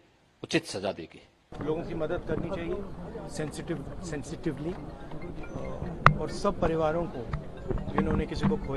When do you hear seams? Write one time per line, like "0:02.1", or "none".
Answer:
0:01.5